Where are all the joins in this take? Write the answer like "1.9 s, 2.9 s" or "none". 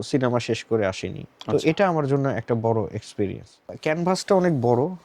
3.7 s